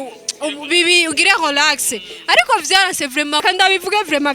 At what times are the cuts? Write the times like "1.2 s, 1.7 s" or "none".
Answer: 3.4 s